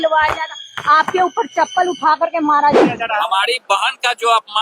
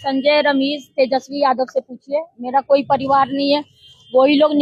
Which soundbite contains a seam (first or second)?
first